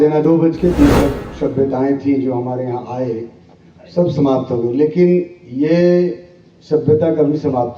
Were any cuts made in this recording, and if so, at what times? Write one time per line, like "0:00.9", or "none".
0:01.0